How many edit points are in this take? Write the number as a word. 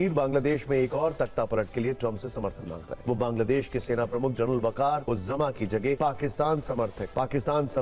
three